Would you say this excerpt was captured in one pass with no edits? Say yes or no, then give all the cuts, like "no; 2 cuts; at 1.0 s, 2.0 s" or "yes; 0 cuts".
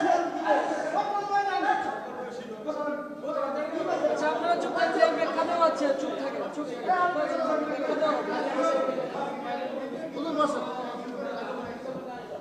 yes; 0 cuts